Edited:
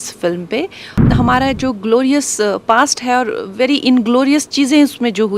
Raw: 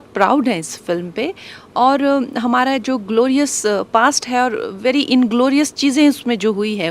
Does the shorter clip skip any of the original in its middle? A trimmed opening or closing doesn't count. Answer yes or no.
yes